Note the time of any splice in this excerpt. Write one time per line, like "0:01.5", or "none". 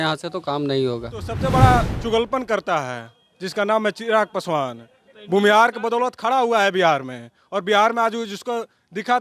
0:01.3

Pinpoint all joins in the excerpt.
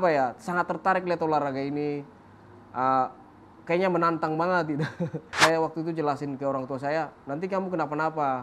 0:05.4

